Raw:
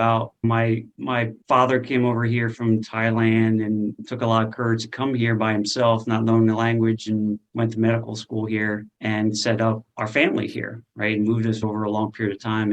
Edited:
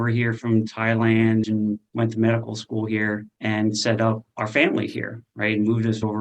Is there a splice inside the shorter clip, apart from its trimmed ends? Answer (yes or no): yes